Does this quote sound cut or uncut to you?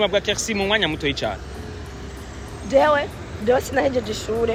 uncut